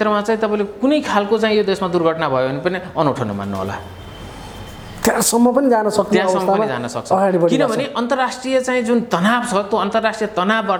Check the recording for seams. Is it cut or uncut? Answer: uncut